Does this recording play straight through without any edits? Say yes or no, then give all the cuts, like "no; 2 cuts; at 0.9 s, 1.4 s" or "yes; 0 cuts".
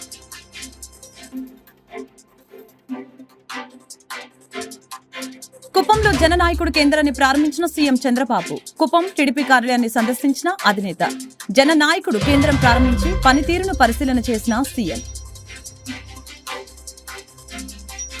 yes; 0 cuts